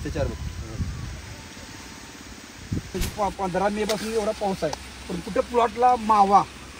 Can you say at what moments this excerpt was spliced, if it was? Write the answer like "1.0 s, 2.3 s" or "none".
3.0 s